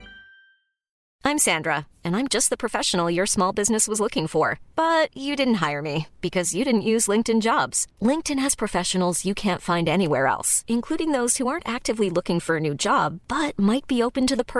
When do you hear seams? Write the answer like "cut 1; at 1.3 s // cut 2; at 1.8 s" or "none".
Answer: cut 1; at 1.0 s